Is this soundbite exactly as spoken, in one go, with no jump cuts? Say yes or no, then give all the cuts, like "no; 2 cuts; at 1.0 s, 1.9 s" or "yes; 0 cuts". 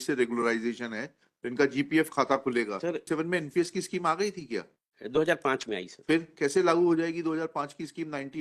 no; 1 cut; at 3.1 s